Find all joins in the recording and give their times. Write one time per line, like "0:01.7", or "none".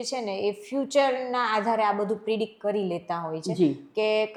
none